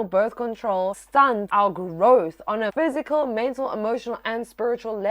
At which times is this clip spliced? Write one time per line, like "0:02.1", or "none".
0:01.1
0:02.7